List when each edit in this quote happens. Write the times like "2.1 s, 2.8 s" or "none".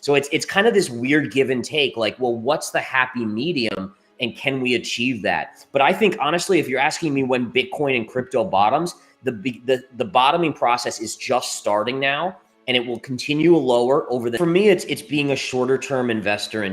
14.4 s